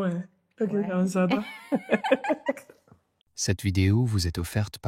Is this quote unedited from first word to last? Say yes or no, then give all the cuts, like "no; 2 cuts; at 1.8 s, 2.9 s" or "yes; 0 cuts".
no; 1 cut; at 3.3 s